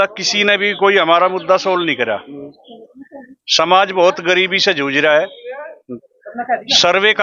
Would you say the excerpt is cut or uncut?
uncut